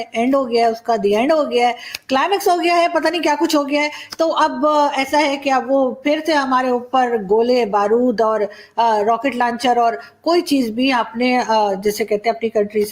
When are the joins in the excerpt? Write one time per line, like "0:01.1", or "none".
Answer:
none